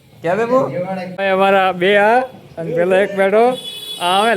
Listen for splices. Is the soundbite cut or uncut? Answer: cut